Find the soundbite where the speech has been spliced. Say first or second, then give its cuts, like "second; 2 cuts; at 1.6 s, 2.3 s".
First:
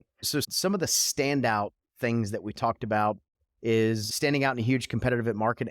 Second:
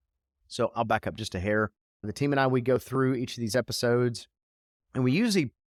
first; 1 cut; at 4.1 s